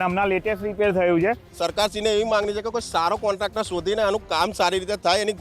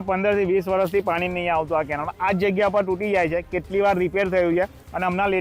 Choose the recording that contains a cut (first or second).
first